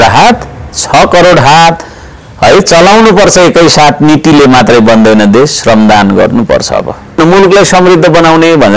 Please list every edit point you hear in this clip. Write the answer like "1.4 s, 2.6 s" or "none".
7.2 s